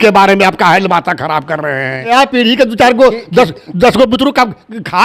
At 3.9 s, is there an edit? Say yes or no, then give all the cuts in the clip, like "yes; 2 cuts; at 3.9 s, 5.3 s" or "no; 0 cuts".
no; 1 cut; at 2.1 s